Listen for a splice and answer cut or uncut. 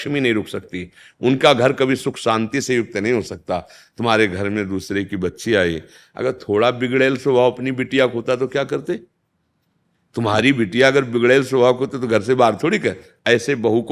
uncut